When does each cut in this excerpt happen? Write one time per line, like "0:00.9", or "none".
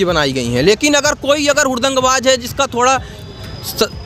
none